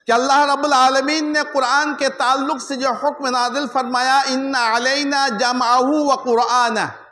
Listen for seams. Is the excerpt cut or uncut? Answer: uncut